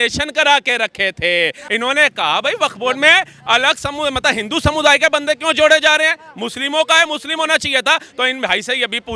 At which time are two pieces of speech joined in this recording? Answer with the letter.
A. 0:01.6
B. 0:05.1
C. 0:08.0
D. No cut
A